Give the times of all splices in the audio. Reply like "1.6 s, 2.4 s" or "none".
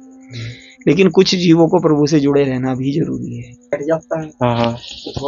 3.8 s

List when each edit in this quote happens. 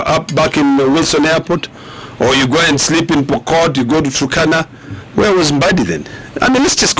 none

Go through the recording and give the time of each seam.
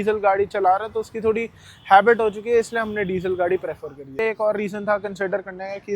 4.1 s

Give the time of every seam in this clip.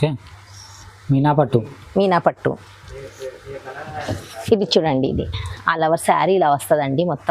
none

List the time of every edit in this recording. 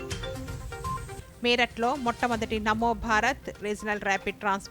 1.2 s

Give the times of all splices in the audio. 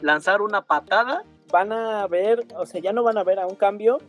1.3 s

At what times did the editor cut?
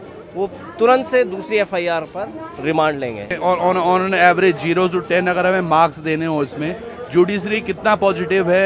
3.3 s

